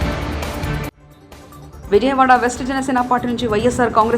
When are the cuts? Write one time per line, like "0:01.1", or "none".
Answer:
0:01.0